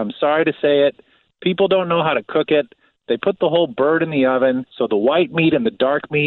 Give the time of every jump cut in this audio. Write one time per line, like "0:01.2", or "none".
none